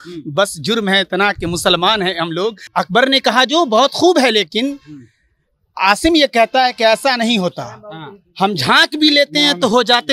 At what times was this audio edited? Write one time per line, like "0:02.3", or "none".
0:02.6